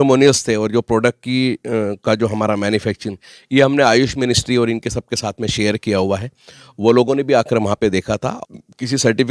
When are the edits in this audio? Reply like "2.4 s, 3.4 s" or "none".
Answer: 8.3 s